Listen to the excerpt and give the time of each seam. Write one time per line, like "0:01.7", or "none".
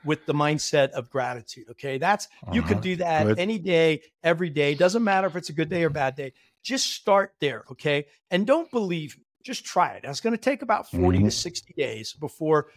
none